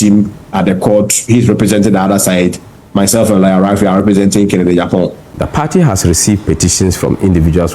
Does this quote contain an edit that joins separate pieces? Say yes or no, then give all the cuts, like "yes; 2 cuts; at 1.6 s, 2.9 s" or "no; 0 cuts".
yes; 1 cut; at 5.3 s